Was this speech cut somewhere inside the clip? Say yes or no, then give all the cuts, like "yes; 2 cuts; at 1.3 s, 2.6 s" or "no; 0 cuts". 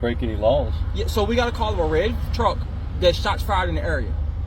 no; 0 cuts